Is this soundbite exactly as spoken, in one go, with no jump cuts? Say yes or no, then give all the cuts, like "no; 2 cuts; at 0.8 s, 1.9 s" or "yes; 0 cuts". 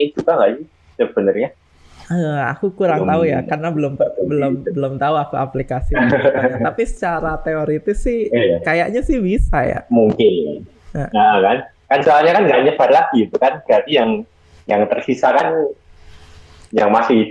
yes; 0 cuts